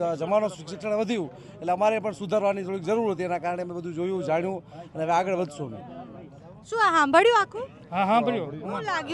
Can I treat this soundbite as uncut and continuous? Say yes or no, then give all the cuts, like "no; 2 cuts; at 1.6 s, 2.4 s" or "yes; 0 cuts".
yes; 0 cuts